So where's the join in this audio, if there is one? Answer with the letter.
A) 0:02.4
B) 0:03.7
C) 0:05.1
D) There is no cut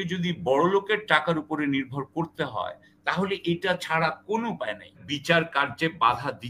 C